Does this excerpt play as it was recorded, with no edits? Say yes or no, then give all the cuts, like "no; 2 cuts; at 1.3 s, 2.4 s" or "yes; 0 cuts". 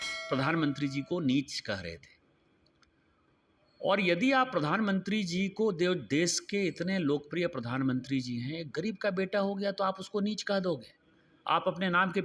yes; 0 cuts